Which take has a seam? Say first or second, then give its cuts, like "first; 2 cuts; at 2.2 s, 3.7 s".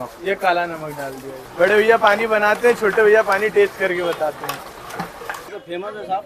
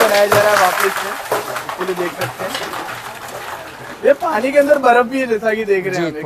first; 2 cuts; at 1.4 s, 5.5 s